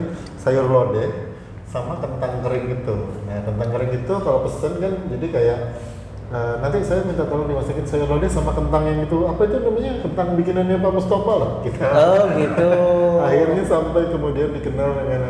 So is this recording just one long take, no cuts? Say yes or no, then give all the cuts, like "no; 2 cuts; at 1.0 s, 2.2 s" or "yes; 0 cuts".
yes; 0 cuts